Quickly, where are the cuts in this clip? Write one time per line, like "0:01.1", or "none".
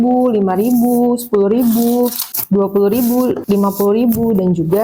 0:02.3
0:03.4